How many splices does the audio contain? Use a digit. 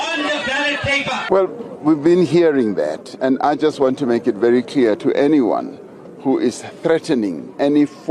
1